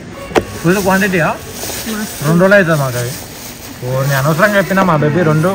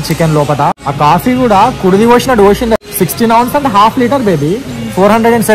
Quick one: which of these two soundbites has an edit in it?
second; 2 cuts; at 0.8 s, 2.8 s

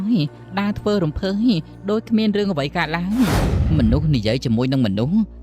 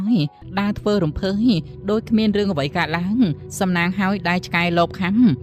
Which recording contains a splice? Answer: first; 1 cut; at 3.4 s

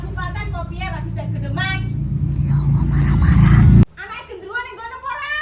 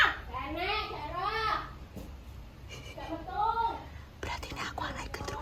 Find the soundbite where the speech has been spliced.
first; 1 cut; at 3.8 s

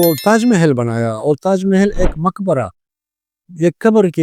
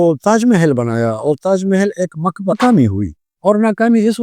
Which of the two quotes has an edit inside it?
second; 1 cut; at 2.6 s

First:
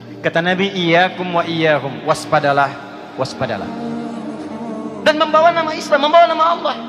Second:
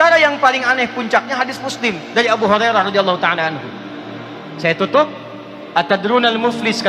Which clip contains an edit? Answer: first; 2 cuts; at 3.7 s, 5.0 s

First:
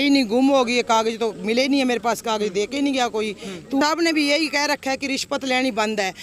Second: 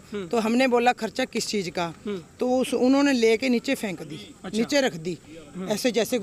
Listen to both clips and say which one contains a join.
first; 1 cut; at 3.8 s

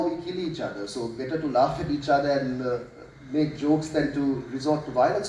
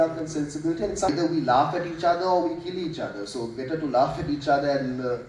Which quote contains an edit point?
second; 1 cut; at 1.1 s

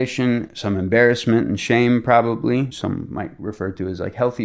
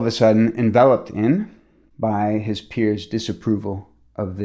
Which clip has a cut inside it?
first; 1 cut; at 2.8 s

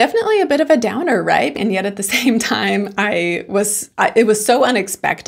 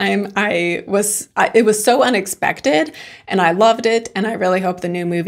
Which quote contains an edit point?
first; 1 cut; at 1.5 s

